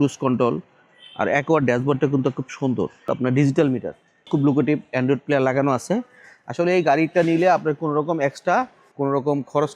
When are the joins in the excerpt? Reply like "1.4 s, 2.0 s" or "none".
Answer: 8.8 s